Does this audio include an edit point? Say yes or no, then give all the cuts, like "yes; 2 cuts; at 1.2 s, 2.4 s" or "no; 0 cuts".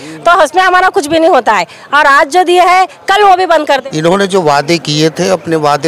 yes; 1 cut; at 3.9 s